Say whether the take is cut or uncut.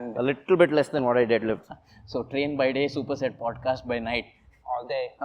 cut